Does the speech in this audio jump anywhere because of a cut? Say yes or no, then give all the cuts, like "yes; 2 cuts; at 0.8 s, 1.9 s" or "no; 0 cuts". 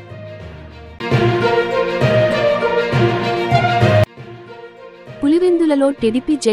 no; 0 cuts